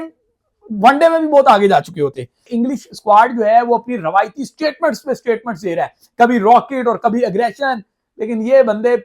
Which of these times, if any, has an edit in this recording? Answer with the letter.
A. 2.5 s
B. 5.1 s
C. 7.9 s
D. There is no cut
A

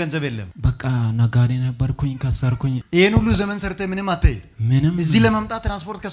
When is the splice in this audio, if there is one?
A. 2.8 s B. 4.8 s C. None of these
A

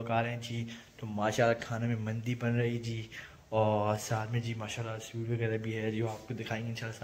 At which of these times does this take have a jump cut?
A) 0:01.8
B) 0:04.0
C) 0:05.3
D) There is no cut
D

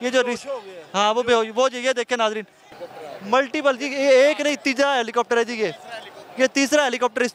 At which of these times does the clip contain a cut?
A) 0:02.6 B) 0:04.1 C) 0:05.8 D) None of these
A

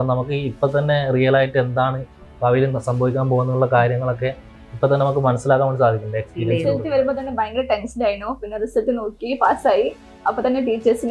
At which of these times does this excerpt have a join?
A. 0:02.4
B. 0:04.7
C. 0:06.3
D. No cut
C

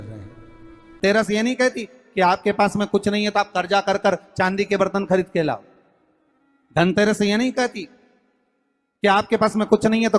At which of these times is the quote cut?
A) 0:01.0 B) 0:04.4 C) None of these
A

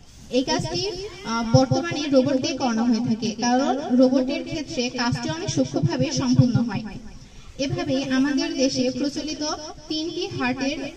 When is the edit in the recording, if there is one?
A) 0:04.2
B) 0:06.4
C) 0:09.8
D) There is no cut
D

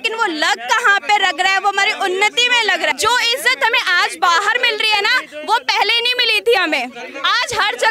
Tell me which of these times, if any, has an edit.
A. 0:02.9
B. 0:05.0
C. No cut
A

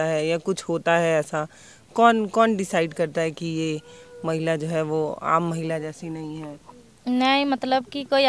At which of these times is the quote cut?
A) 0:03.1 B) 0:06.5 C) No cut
C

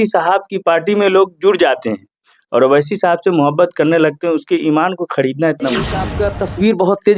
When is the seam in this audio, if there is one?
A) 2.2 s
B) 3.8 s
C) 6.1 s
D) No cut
C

